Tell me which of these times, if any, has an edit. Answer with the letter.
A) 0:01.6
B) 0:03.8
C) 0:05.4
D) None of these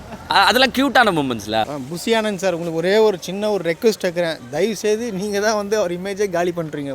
A